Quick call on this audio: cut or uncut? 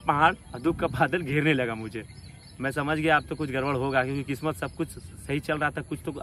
uncut